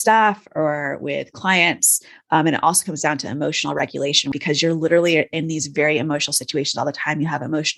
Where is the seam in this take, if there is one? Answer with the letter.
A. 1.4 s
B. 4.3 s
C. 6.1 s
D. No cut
B